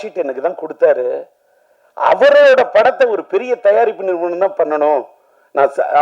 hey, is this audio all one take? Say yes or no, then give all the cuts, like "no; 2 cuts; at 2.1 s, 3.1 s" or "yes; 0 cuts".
yes; 0 cuts